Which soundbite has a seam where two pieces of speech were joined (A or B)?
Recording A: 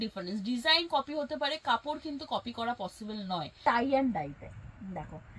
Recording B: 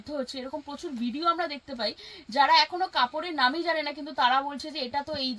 A